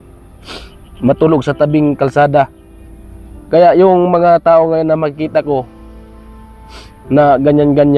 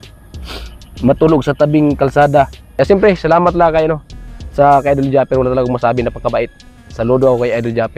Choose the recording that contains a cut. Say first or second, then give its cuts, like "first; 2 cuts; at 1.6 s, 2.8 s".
second; 1 cut; at 2.8 s